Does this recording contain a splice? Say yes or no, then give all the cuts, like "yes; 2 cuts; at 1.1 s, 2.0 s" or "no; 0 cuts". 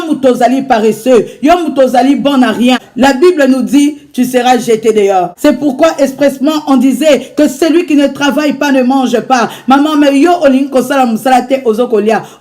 yes; 2 cuts; at 2.9 s, 5.3 s